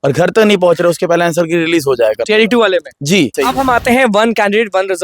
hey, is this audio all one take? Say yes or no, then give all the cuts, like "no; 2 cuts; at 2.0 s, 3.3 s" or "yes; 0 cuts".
no; 1 cut; at 3.3 s